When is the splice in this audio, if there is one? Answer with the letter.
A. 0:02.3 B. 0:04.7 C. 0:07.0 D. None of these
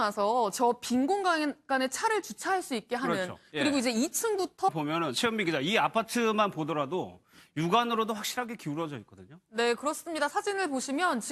D